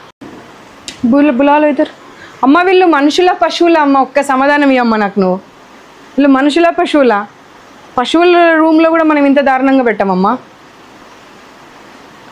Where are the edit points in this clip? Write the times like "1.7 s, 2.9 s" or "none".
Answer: none